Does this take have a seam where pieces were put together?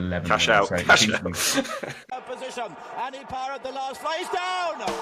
yes; 1 cut; at 1.8 s

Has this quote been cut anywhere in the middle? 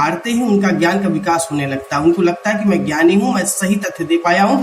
no; 0 cuts

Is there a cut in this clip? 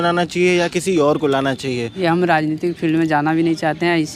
yes; 1 cut; at 1.9 s

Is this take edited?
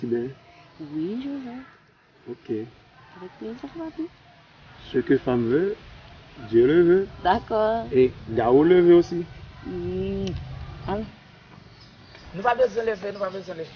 no; 0 cuts

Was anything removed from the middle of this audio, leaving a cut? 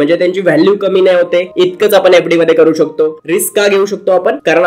yes; 1 cut; at 3.2 s

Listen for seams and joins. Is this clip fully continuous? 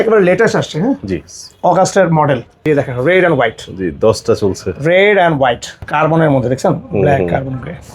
no; 2 cuts; at 2.7 s, 5.7 s

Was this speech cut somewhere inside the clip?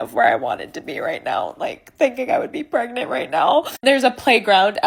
no; 0 cuts

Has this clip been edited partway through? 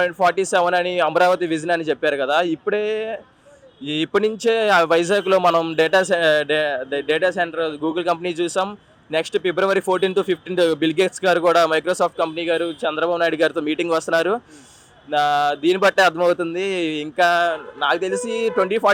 no; 0 cuts

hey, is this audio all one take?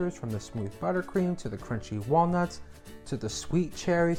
yes; 0 cuts

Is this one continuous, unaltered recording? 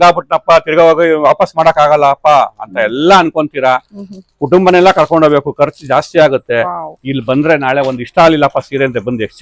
yes; 0 cuts

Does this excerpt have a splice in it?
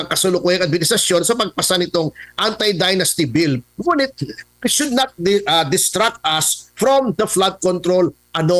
no; 0 cuts

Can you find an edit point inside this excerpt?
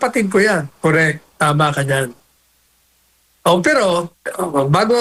no; 0 cuts

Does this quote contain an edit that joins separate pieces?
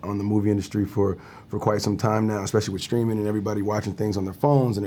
no; 0 cuts

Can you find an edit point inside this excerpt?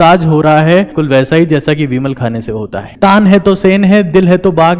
yes; 2 cuts; at 1.0 s, 2.8 s

